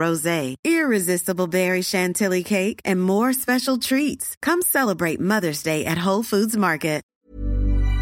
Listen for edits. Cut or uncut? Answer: cut